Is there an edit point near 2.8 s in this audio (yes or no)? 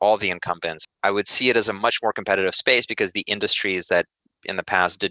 no